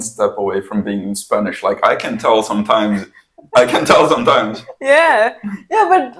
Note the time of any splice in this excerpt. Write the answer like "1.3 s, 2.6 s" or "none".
none